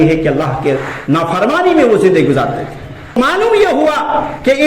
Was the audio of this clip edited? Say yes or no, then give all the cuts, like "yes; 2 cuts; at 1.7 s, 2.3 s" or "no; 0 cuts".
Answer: yes; 1 cut; at 3.1 s